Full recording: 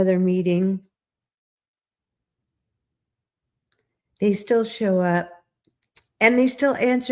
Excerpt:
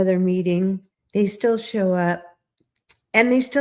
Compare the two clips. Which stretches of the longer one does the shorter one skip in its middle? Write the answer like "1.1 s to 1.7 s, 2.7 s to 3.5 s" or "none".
0.9 s to 4.0 s